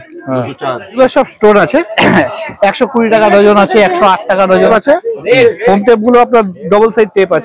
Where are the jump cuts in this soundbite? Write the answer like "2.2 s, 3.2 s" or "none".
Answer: 1.0 s, 4.7 s